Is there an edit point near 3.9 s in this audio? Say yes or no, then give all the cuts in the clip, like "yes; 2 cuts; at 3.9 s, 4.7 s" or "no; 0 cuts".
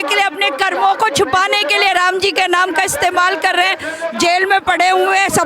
no; 0 cuts